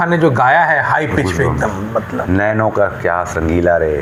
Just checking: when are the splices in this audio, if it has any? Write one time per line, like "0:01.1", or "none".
none